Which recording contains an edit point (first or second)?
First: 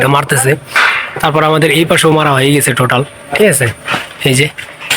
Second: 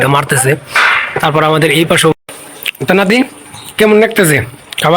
second